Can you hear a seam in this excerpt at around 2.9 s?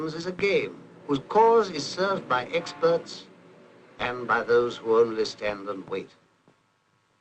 no; 1 cut; at 5.7 s

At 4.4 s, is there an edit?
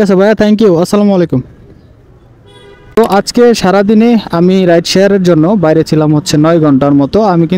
no; 1 cut; at 3.0 s

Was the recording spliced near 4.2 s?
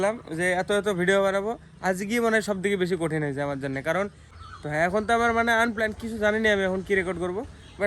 yes; 1 cut; at 4.2 s

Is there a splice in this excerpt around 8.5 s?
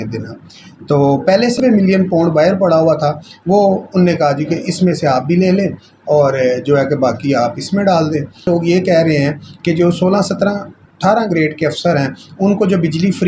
yes; 2 cuts; at 1.6 s, 8.5 s

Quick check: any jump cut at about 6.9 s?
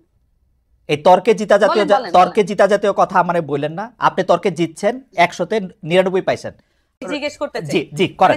yes; 1 cut; at 6.9 s

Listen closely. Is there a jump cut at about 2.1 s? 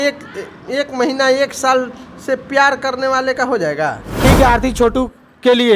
no; 1 cut; at 4.2 s

